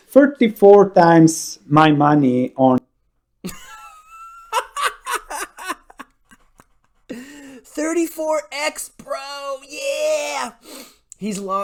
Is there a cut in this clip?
no; 0 cuts

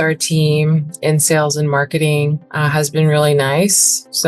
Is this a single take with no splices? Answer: no; 1 cut; at 2.5 s

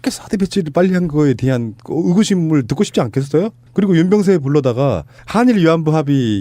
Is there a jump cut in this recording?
no; 0 cuts

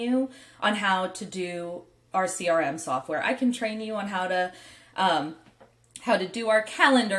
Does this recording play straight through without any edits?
yes; 0 cuts

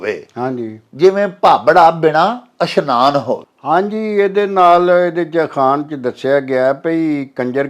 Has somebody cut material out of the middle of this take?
no; 0 cuts

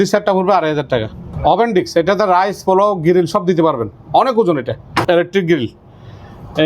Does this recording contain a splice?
yes; 2 cuts; at 1.2 s, 5.0 s

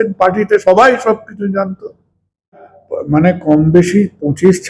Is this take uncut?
no; 1 cut; at 2.8 s

